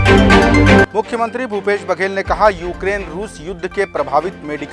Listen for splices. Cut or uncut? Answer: cut